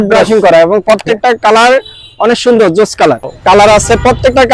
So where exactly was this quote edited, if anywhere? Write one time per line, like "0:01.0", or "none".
0:03.5